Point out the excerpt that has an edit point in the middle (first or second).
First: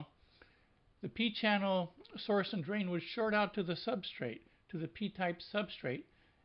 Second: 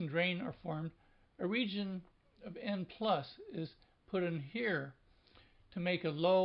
second